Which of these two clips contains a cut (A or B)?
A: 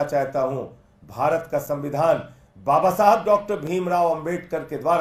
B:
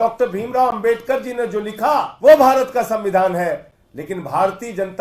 B